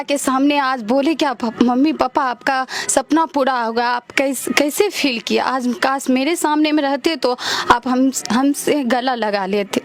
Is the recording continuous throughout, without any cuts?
yes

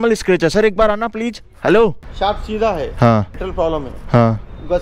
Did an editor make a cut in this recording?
yes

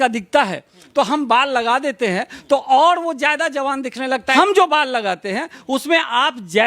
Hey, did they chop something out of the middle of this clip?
yes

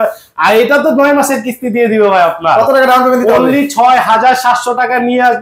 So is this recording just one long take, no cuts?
yes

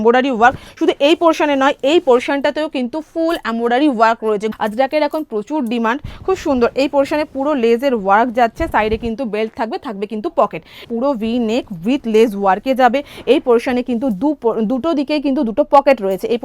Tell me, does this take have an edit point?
yes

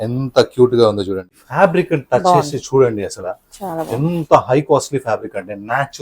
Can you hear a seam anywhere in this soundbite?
yes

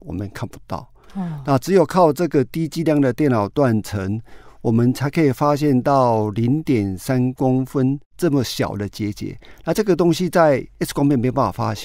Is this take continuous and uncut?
no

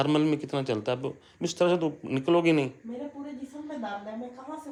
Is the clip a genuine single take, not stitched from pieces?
yes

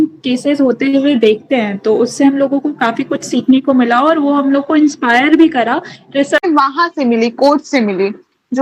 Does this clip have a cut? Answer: yes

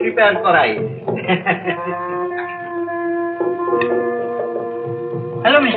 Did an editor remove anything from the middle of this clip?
no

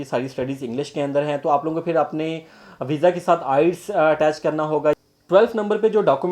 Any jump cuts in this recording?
yes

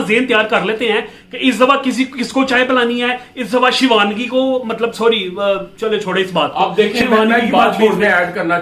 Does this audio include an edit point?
no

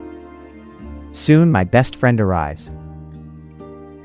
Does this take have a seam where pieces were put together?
no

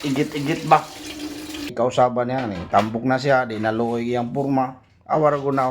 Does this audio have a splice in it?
yes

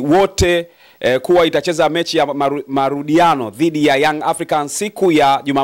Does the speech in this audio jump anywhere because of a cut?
no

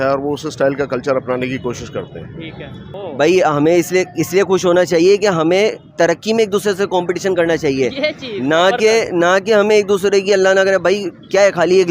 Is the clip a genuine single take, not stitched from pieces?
no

